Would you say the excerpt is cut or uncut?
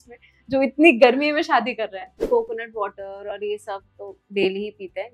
cut